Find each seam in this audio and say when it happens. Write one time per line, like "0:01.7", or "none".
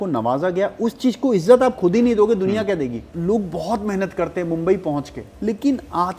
0:03.1
0:05.2